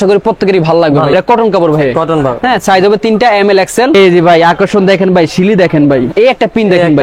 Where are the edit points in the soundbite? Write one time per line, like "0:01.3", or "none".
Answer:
0:01.1
0:03.9
0:06.1